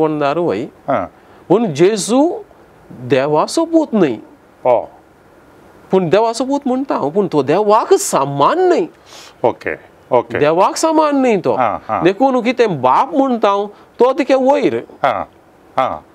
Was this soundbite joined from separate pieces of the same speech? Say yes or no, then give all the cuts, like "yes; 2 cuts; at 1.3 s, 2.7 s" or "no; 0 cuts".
no; 0 cuts